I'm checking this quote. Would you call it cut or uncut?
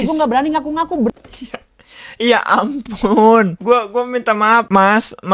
uncut